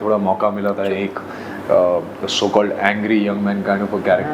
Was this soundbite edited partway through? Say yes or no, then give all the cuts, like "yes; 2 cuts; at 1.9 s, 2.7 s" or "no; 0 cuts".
no; 0 cuts